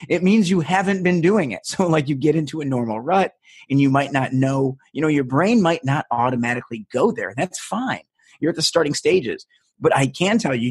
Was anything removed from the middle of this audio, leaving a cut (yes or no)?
yes